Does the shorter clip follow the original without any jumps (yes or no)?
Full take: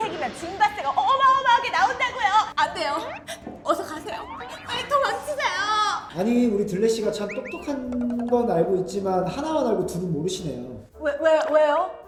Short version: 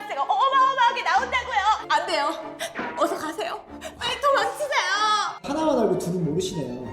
no